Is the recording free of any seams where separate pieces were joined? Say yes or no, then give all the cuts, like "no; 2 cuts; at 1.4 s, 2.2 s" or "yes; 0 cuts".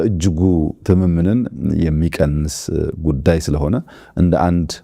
yes; 0 cuts